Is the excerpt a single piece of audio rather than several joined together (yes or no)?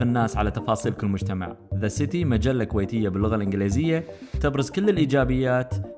yes